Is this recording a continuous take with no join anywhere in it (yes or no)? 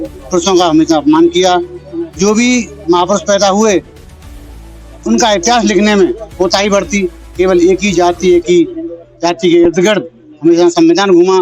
yes